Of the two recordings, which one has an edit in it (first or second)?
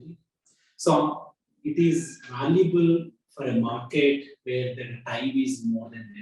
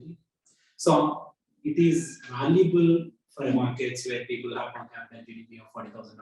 second